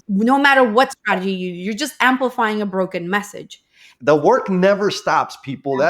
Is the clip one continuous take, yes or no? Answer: no